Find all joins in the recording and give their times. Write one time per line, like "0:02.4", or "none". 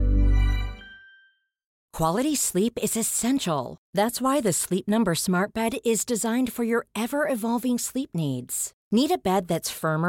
0:01.8